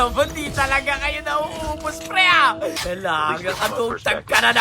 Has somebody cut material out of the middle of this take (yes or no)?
yes